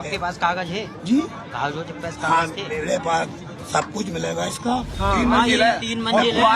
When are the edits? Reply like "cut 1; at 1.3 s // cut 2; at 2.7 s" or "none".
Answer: cut 1; at 4.9 s